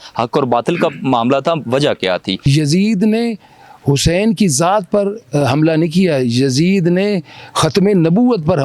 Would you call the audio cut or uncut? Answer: cut